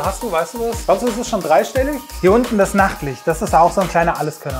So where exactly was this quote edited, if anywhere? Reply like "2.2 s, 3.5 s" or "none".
0.8 s, 2.0 s